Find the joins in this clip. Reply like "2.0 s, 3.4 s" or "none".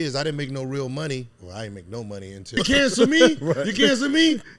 2.6 s